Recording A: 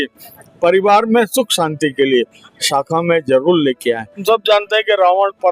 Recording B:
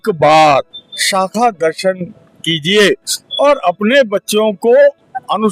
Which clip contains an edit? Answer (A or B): A